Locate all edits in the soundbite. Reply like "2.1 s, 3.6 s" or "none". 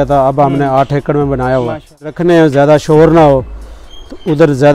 2.2 s